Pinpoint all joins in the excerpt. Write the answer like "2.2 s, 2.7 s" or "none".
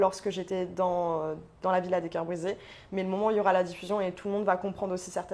none